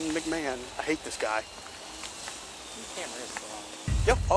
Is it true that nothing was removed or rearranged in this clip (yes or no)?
no